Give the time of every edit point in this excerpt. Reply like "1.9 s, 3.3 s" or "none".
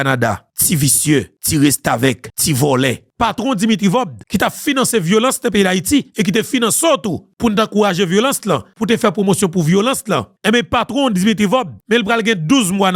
none